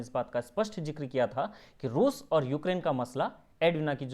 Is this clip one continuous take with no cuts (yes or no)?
yes